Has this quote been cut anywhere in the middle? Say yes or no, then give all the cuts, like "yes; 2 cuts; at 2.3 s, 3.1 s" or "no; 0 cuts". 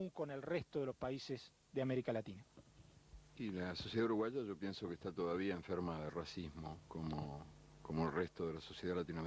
no; 0 cuts